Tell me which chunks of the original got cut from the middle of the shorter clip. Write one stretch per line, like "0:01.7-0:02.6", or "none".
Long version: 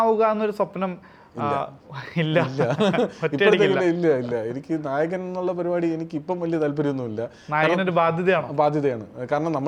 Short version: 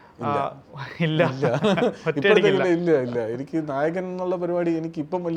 none